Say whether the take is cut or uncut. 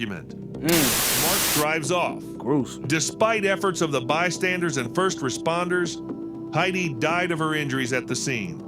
cut